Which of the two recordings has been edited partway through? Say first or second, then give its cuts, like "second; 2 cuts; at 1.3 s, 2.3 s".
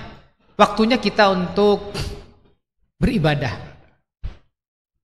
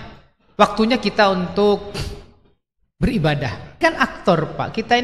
second; 1 cut; at 3.8 s